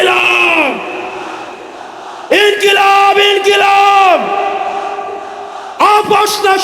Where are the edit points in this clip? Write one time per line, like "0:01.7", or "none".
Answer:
none